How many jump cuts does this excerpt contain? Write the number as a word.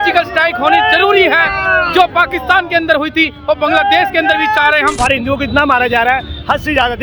one